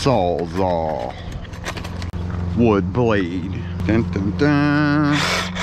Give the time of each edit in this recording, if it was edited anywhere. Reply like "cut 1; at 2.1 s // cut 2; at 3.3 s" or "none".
cut 1; at 2.1 s // cut 2; at 3.7 s